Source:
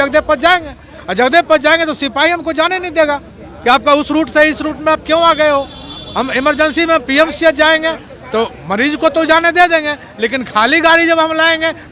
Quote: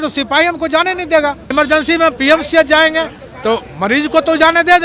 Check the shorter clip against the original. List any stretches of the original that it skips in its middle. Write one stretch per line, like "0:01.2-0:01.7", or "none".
0:03.3-0:06.3